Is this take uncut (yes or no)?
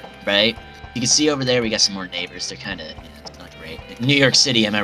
no